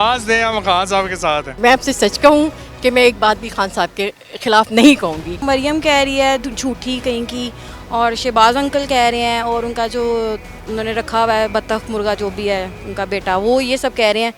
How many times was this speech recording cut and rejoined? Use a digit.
2